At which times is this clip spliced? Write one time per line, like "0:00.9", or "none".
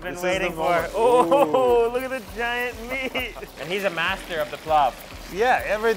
0:03.5